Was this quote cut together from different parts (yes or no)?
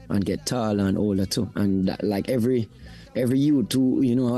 no